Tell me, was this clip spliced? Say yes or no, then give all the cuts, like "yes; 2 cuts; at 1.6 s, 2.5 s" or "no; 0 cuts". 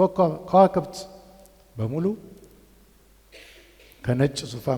no; 0 cuts